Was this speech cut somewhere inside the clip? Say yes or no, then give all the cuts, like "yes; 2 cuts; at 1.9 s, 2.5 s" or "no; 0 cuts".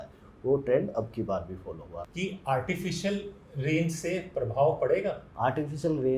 yes; 2 cuts; at 1.9 s, 5.3 s